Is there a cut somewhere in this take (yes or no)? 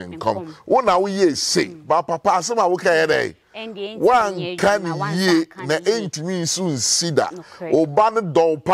no